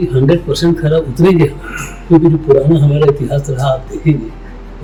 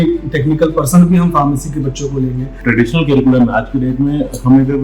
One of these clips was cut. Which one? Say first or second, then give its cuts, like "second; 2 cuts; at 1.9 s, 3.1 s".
second; 1 cut; at 2.5 s